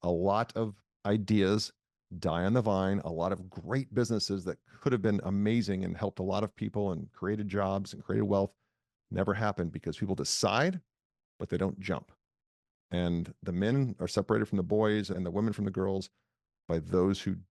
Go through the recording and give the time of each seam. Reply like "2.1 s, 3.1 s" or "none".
15.1 s